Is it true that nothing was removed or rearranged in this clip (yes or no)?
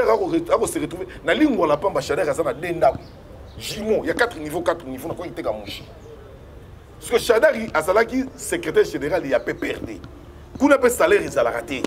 yes